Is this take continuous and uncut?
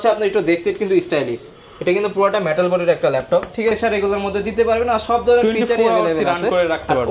no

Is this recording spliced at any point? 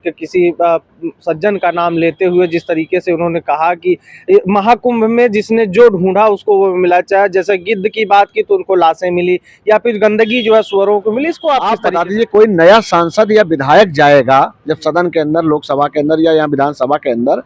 yes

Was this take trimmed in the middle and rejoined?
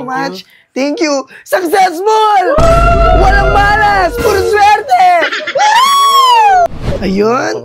no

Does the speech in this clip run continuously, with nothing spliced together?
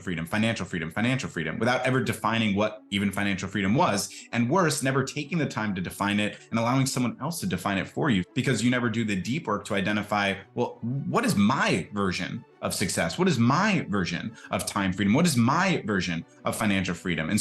no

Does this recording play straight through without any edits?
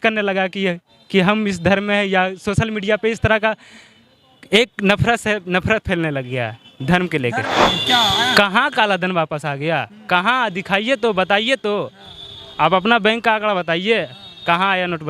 no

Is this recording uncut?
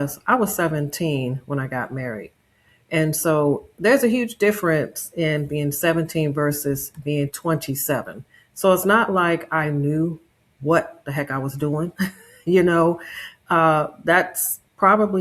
yes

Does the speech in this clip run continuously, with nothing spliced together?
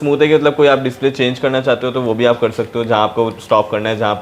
yes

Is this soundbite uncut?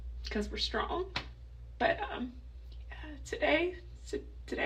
yes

